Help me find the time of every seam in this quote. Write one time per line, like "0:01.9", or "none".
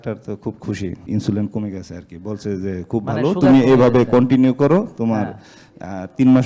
0:01.0